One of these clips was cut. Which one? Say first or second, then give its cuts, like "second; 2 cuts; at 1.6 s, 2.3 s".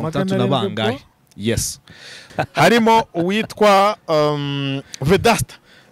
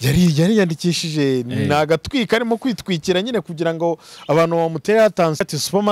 first; 1 cut; at 2.2 s